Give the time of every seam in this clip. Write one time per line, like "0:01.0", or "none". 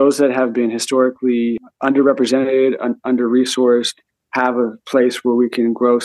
0:01.6